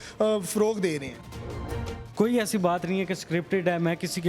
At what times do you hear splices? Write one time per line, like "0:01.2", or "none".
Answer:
0:01.4